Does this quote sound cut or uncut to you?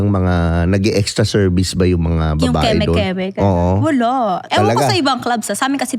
cut